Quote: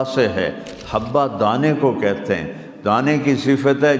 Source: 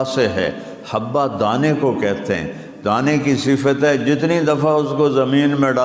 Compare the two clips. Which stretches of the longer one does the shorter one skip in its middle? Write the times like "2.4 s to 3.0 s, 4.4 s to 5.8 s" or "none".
none